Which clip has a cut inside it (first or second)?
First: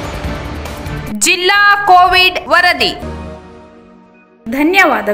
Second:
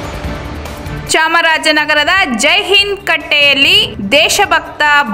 second